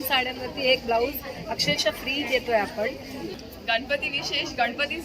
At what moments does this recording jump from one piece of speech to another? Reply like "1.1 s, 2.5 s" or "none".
3.4 s